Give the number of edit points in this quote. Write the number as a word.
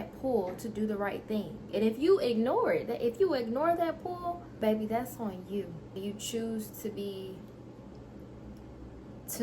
two